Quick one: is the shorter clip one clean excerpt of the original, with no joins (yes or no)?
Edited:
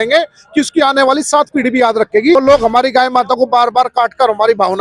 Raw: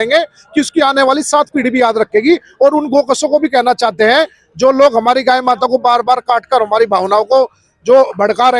no